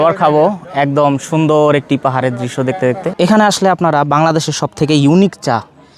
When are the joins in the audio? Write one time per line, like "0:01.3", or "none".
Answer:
0:03.1